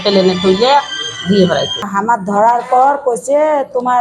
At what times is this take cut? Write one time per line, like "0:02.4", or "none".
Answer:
0:01.8